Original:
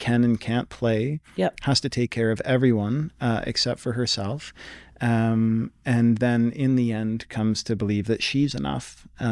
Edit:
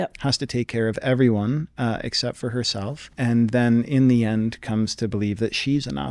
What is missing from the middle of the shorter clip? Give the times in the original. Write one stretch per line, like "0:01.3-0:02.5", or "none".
0:04.5-0:05.8